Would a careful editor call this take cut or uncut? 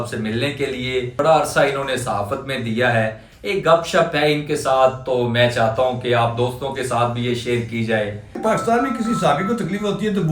cut